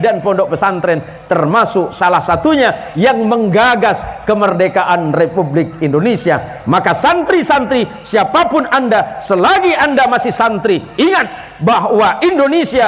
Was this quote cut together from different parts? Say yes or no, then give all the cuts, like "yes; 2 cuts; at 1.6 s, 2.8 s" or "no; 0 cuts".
no; 0 cuts